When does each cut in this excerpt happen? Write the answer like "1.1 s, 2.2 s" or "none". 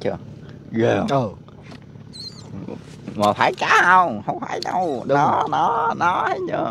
none

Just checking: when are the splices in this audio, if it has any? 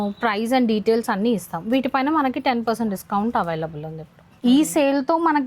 4.2 s

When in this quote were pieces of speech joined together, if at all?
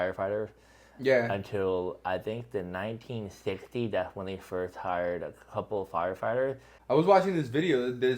6.7 s

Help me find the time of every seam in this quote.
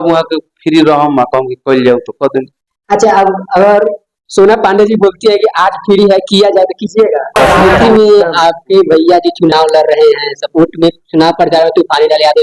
7.6 s

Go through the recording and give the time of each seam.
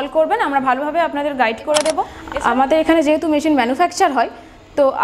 2.2 s

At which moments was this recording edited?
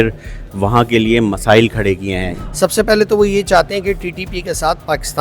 2.3 s

